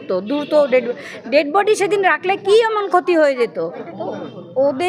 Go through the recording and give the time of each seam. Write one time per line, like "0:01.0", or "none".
0:03.6